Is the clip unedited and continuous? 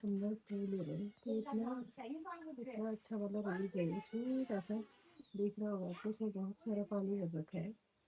yes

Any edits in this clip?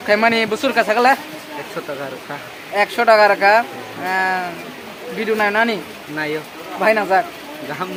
no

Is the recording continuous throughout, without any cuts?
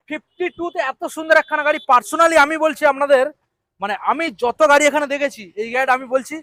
yes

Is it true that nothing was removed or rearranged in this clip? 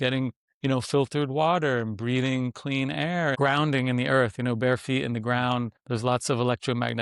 no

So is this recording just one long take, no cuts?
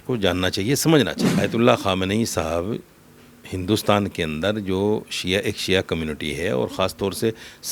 no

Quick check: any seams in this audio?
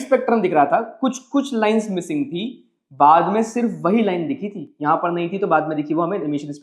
no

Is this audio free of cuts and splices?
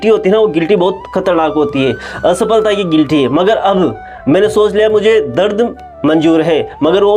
yes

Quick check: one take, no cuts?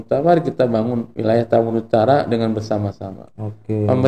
no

